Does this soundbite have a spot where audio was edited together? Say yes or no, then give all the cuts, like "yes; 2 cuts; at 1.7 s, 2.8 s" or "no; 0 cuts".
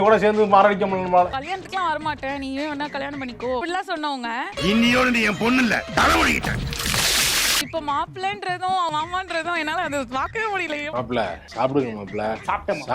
yes; 3 cuts; at 1.3 s, 7.6 s, 10.9 s